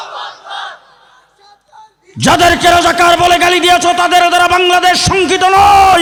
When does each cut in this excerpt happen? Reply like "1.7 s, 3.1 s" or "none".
none